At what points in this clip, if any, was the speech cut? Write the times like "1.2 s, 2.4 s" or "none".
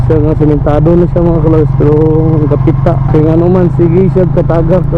3.0 s